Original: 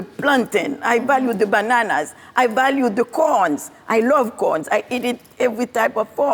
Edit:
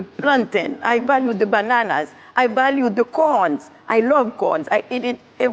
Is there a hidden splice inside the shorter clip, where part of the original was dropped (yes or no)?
no